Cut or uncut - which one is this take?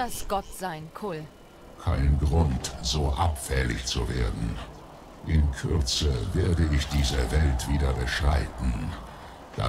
cut